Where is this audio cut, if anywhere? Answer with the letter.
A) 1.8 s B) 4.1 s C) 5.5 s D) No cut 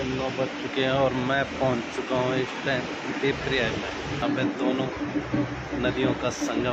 D